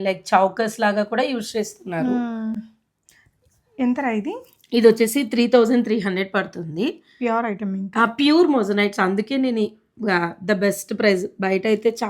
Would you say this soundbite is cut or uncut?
uncut